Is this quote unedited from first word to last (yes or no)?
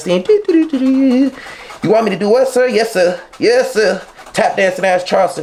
yes